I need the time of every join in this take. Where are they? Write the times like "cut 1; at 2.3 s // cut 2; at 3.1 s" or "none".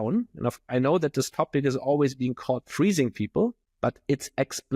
cut 1; at 3.7 s

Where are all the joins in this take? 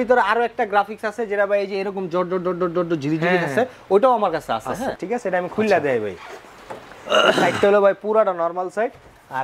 cut 1; at 5.0 s

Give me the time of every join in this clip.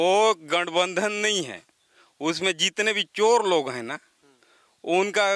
none

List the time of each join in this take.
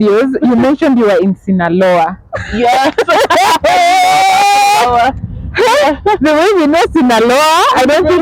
none

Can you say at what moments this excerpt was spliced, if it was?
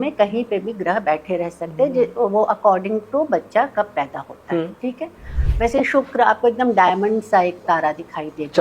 cut 1; at 5.3 s

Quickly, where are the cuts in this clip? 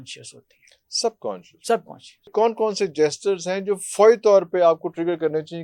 cut 1; at 2.3 s

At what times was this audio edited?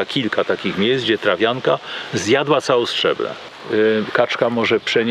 cut 1; at 3.5 s

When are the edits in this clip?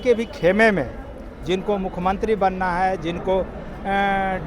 none

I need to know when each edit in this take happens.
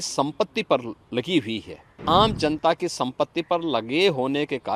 cut 1; at 2.0 s

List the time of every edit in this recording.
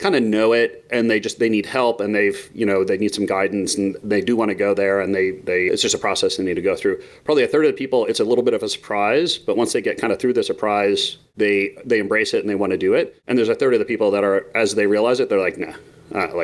cut 1; at 11.2 s // cut 2; at 13.2 s

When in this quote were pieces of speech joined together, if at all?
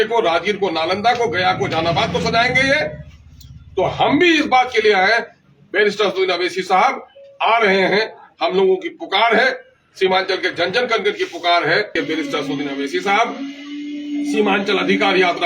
cut 1; at 11.9 s

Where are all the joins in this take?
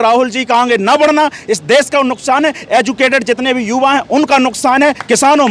none

